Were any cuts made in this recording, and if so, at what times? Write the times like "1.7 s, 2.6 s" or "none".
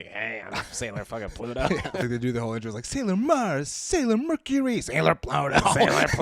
2.0 s